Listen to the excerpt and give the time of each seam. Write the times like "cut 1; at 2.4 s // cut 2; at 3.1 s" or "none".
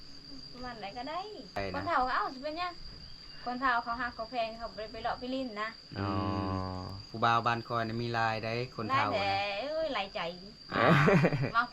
cut 1; at 1.6 s